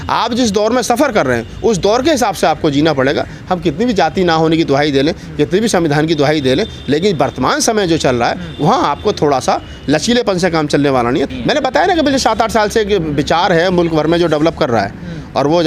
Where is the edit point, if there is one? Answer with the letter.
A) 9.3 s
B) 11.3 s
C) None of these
B